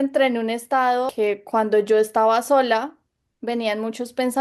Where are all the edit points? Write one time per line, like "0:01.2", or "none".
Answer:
0:01.1